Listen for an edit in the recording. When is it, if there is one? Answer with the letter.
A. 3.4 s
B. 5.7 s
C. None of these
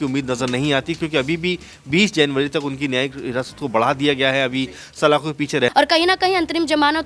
B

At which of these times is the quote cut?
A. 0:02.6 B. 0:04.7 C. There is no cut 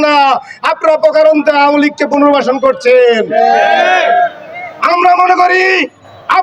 C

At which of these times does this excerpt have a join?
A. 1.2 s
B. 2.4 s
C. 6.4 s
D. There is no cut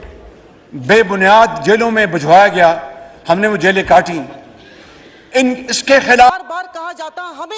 C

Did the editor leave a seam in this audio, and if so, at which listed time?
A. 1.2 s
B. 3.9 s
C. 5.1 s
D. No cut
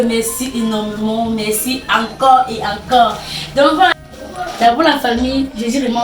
B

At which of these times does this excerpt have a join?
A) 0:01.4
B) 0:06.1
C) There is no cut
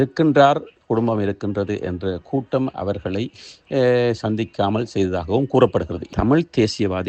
B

